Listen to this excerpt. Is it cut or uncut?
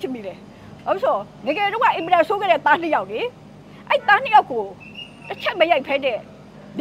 uncut